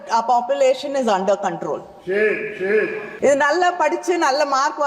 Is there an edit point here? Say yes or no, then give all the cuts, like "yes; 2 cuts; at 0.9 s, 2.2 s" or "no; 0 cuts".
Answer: yes; 1 cut; at 3.0 s